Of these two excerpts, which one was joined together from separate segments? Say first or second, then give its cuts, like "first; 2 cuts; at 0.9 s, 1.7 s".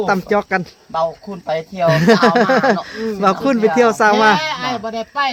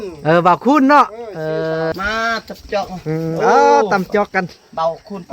second; 1 cut; at 1.9 s